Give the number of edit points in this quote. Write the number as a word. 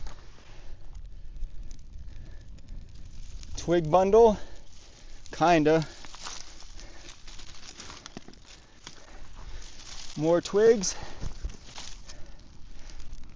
zero